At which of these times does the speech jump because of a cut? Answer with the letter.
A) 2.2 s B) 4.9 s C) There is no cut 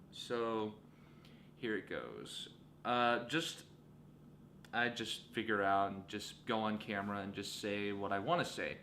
A